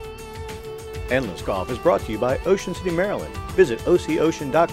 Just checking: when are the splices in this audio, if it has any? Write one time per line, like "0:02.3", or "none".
0:01.1